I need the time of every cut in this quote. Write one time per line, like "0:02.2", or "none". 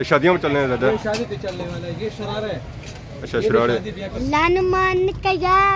0:04.1